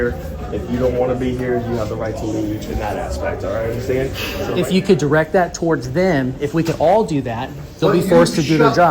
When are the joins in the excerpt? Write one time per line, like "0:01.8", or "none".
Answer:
0:04.5

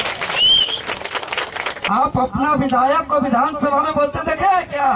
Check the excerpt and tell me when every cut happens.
0:01.8

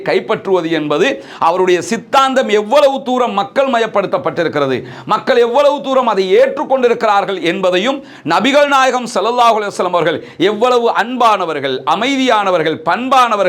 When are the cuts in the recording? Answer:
none

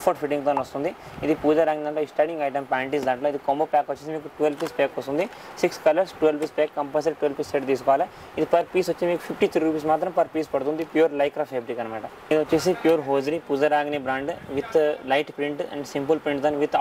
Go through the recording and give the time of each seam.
none

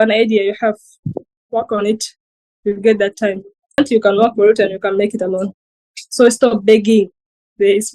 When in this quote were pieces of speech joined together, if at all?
0:03.8

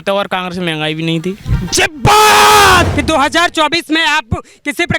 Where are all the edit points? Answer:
0:02.9

